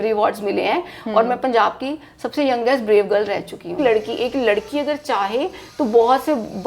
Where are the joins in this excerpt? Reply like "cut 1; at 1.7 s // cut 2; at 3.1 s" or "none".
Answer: cut 1; at 3.8 s